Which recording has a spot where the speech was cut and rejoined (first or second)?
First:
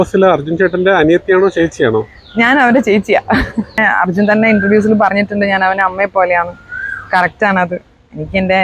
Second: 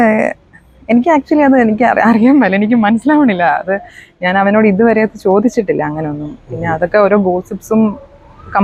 first